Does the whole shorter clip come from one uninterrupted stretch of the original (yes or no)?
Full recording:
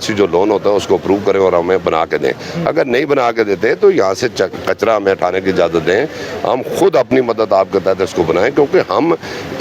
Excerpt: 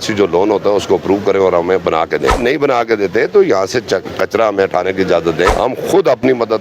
no